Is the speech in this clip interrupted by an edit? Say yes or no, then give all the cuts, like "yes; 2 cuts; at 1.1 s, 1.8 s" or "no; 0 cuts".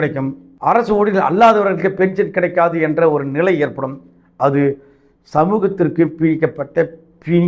no; 0 cuts